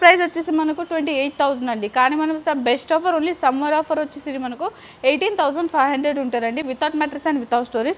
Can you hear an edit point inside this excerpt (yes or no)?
no